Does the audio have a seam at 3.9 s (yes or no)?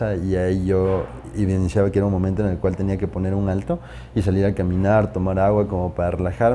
no